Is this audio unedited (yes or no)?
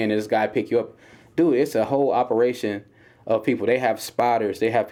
yes